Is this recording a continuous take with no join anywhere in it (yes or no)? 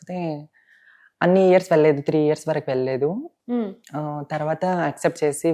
yes